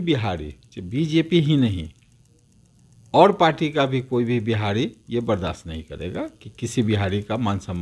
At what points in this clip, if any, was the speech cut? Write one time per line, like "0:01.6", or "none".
none

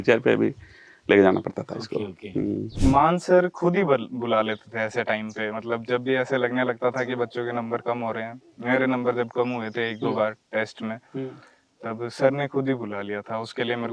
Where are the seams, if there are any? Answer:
0:02.7

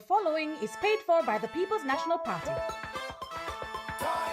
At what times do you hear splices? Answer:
0:02.3

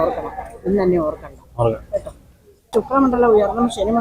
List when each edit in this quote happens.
0:02.7

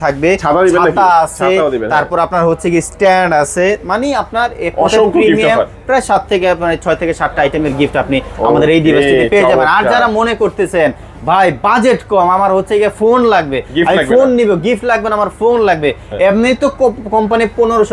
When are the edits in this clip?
none

